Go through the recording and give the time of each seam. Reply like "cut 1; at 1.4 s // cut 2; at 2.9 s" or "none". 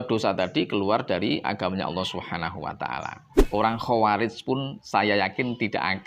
cut 1; at 3.3 s

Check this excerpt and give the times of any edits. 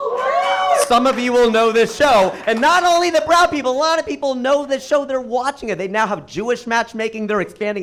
none

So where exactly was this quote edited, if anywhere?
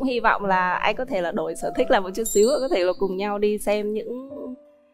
none

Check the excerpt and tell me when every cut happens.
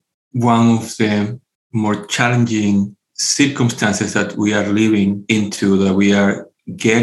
none

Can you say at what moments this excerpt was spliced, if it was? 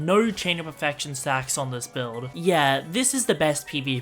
cut 1; at 2.3 s

